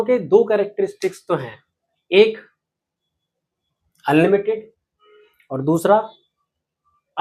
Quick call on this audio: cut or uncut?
uncut